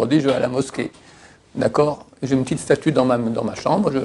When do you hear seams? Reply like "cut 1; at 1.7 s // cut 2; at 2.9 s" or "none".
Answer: none